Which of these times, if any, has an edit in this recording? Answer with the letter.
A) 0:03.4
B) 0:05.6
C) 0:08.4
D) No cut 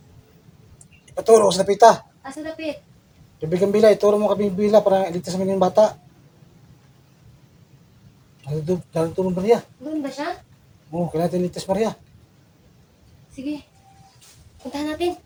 D